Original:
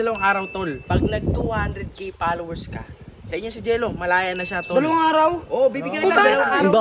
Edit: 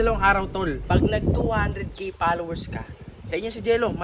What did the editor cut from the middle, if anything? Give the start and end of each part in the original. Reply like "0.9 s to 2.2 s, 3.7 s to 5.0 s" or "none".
none